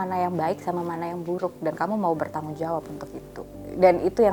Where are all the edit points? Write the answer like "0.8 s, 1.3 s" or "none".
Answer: none